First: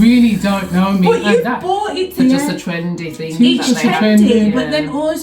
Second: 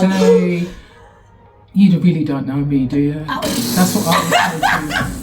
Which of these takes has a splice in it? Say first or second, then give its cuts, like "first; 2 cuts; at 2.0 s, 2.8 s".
first; 1 cut; at 2.1 s